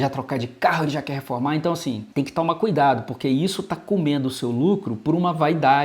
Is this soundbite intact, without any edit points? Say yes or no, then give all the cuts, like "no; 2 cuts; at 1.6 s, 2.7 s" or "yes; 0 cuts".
no; 1 cut; at 2.0 s